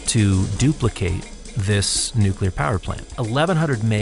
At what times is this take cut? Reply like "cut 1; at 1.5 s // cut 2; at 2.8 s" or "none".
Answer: cut 1; at 3.0 s